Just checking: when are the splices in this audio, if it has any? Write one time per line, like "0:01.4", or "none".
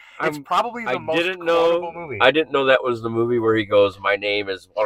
none